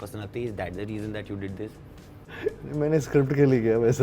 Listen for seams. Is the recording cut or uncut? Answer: cut